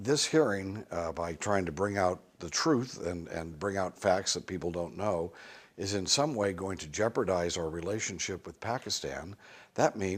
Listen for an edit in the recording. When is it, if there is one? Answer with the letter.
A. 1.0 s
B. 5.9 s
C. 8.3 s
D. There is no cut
C